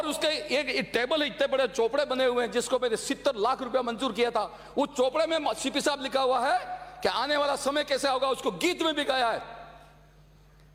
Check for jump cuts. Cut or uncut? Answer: uncut